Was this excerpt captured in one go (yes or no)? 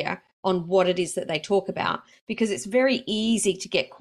no